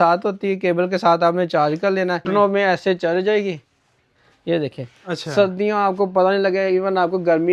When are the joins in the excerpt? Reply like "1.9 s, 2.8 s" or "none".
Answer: 2.3 s